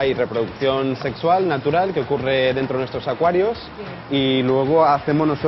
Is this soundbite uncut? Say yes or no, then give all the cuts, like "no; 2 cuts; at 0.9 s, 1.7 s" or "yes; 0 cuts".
yes; 0 cuts